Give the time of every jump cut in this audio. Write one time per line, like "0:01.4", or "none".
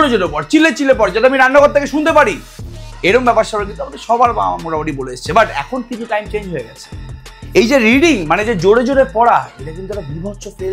none